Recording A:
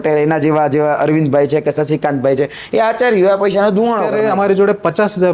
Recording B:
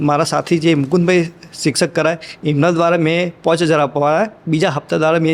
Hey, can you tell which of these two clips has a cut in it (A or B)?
A